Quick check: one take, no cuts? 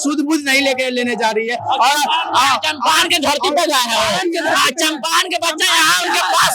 yes; 0 cuts

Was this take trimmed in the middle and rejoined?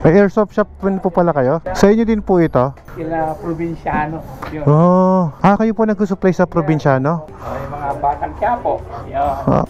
yes; 1 cut; at 7.3 s

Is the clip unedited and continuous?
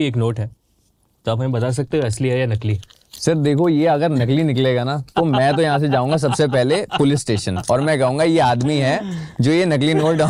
yes; 0 cuts

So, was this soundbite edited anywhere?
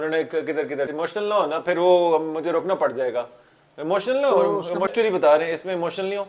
yes; 2 cuts; at 0.9 s, 4.9 s

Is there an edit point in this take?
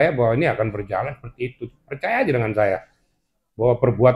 no; 0 cuts

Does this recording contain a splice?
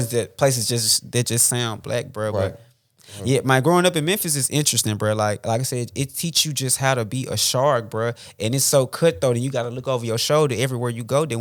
no; 0 cuts

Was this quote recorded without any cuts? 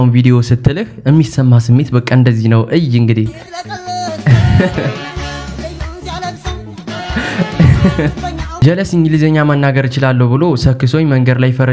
no; 1 cut; at 8.5 s

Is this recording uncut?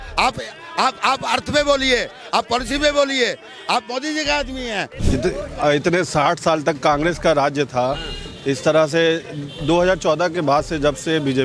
no; 1 cut; at 5.0 s

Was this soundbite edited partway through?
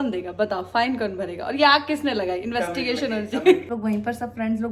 yes; 1 cut; at 3.7 s

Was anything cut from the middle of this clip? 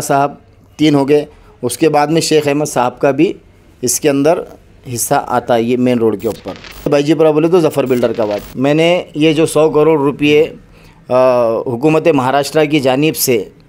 yes; 2 cuts; at 6.9 s, 8.4 s

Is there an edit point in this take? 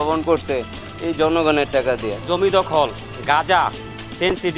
yes; 1 cut; at 2.2 s

